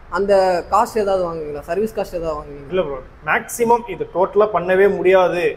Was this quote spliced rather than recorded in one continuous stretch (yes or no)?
yes